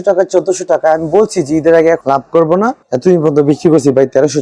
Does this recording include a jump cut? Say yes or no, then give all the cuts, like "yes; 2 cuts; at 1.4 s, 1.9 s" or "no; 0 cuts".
yes; 1 cut; at 2.8 s